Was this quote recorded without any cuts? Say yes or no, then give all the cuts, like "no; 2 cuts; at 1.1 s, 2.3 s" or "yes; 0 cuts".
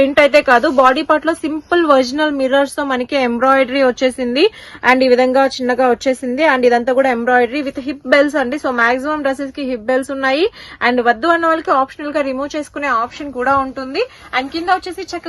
yes; 0 cuts